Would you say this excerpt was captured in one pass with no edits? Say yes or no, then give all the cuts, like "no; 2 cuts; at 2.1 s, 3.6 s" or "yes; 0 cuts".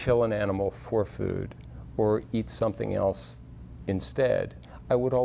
yes; 0 cuts